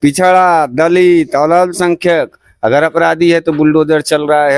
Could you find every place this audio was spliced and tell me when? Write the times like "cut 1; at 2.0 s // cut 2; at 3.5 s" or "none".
none